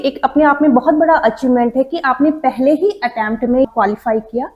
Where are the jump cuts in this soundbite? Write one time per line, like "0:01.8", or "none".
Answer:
0:03.7